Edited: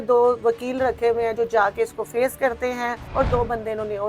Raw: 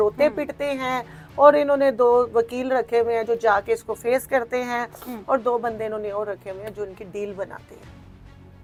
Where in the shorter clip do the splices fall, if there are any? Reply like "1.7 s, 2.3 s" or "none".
3.0 s